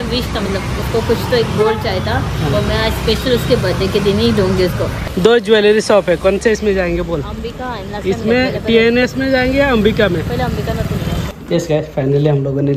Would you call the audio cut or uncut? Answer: cut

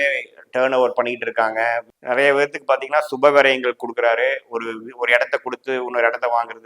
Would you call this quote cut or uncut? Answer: cut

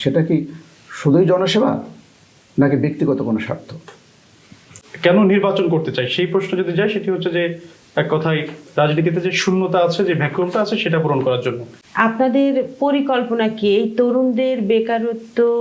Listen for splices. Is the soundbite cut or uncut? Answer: cut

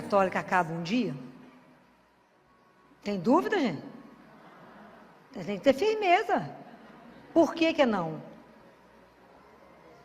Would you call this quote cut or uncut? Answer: cut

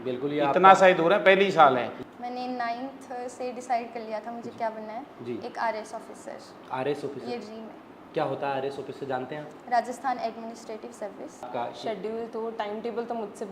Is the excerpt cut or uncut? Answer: cut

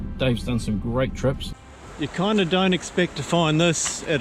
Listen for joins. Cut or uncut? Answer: cut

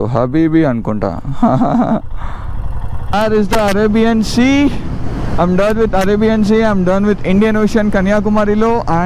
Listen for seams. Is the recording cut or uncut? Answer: cut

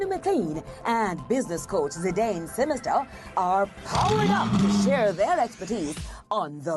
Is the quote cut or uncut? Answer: uncut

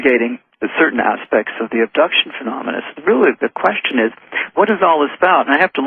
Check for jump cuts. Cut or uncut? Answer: cut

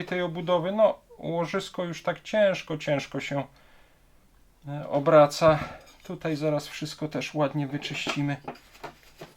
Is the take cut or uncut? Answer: uncut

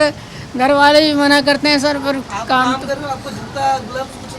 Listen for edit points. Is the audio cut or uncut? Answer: uncut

